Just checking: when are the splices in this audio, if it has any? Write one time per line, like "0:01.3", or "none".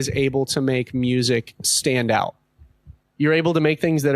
0:03.0